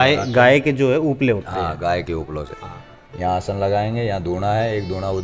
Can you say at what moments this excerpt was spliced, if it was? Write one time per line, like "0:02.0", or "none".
none

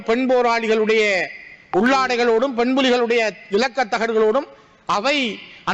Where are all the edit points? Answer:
none

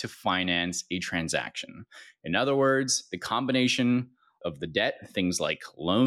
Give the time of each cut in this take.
0:04.4

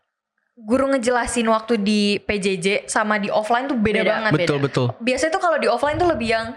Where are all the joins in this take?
none

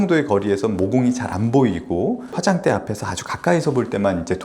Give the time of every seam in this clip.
0:01.3
0:02.4

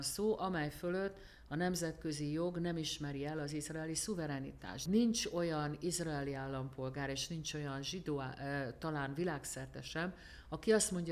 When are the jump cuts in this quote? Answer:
0:04.8

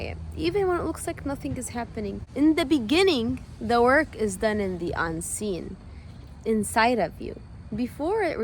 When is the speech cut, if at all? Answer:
0:02.2

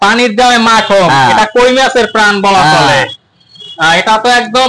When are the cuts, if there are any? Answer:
none

